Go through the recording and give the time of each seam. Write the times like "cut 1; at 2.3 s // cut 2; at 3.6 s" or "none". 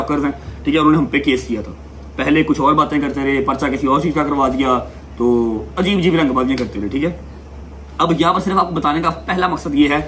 none